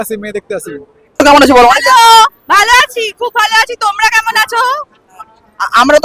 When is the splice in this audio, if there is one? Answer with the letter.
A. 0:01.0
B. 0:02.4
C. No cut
A